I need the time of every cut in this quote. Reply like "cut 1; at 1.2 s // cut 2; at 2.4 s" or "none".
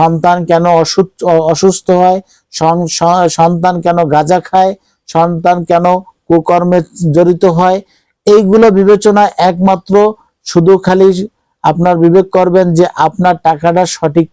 none